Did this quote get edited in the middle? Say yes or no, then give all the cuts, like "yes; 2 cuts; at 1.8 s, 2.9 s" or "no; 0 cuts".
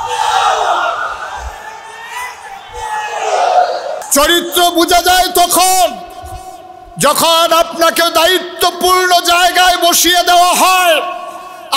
yes; 1 cut; at 4.0 s